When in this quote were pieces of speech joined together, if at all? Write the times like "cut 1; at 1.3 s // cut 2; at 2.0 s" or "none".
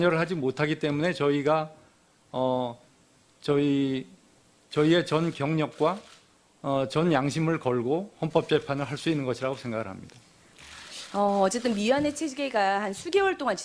cut 1; at 8.2 s